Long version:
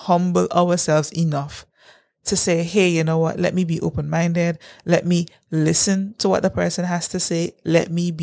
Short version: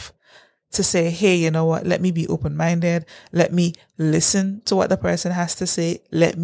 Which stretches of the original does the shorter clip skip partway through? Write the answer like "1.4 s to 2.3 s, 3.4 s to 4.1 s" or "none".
none